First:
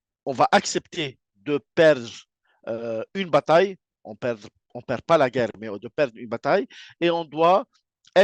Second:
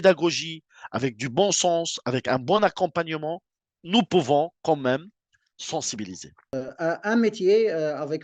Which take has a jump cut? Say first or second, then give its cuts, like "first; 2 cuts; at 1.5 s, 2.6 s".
second; 1 cut; at 6.5 s